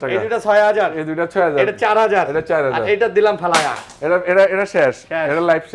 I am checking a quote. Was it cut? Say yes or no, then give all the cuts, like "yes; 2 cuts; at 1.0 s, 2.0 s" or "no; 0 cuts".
no; 0 cuts